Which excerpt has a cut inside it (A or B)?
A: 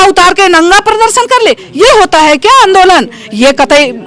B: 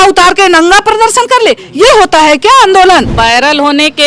B